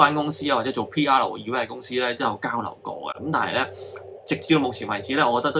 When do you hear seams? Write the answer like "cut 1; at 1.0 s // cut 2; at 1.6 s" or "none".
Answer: none